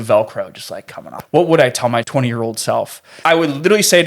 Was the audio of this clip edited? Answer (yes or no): yes